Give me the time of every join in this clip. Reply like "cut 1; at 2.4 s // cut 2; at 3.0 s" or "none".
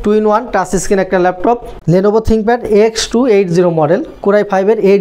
cut 1; at 1.7 s